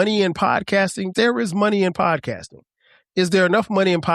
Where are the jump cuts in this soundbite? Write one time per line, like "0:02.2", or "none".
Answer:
0:01.1